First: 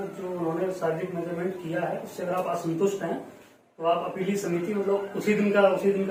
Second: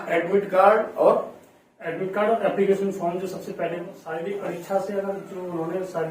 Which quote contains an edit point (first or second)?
second